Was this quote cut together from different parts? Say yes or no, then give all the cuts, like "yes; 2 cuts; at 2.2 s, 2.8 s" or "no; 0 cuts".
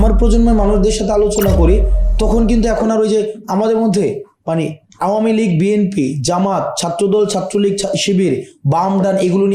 no; 0 cuts